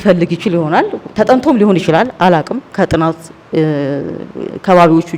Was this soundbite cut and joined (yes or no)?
no